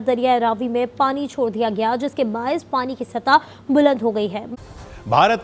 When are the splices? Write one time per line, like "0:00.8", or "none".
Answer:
0:04.4